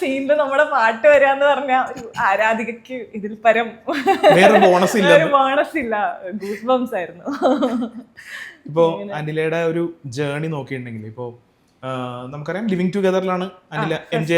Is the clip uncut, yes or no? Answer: yes